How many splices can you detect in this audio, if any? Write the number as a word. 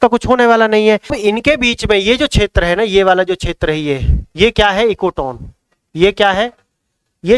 one